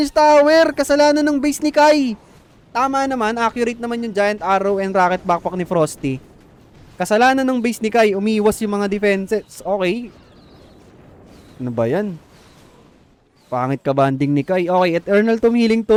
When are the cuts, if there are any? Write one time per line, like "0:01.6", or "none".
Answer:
none